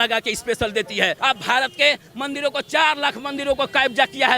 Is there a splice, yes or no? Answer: yes